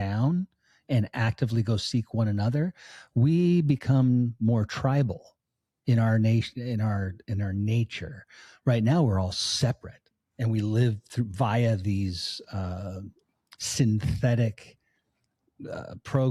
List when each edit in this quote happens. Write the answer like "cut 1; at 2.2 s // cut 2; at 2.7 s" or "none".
none